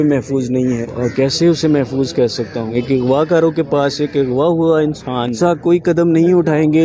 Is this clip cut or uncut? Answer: cut